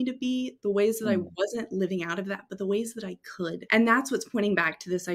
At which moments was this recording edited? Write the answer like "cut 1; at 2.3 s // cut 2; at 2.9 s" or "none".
cut 1; at 3.6 s